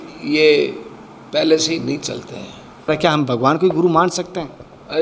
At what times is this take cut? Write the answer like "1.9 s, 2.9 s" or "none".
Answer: 2.9 s

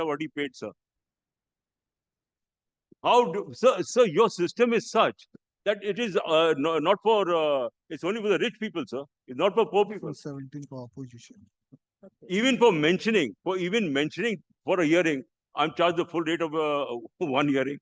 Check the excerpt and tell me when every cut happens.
none

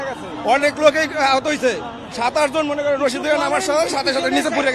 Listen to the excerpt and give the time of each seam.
none

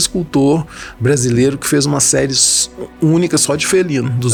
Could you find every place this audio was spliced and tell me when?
none

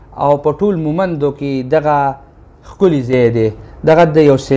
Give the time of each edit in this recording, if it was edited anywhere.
none

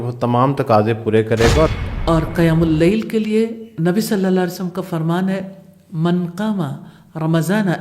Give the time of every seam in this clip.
1.7 s

